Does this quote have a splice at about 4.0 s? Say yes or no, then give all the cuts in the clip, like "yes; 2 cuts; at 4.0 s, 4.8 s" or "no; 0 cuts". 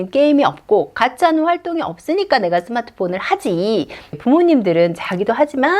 yes; 1 cut; at 4.0 s